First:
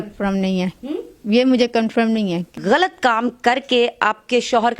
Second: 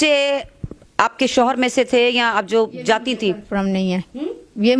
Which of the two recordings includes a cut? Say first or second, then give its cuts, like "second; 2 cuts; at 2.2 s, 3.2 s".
first; 1 cut; at 2.5 s